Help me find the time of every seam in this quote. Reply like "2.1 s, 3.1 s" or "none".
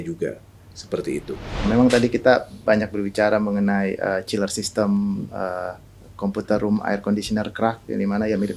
1.6 s